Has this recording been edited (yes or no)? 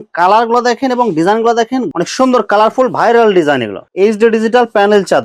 no